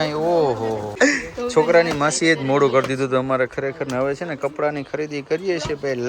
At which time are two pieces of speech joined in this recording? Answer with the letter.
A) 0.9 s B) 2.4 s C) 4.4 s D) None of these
A